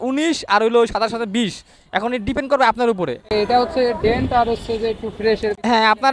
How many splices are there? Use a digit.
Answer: 0